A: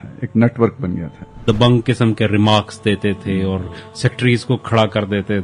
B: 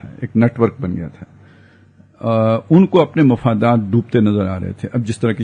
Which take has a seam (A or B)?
A